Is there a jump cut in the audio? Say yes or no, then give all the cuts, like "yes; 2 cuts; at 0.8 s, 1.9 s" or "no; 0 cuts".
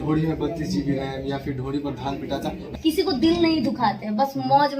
yes; 1 cut; at 2.7 s